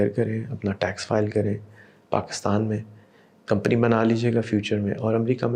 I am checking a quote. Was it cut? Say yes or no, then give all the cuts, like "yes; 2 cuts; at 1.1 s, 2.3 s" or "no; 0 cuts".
no; 0 cuts